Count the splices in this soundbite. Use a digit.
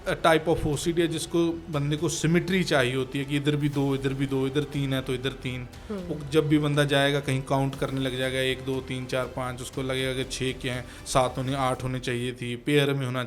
0